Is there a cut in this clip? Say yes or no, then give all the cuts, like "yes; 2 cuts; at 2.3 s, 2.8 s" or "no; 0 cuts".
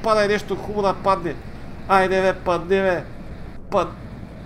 no; 0 cuts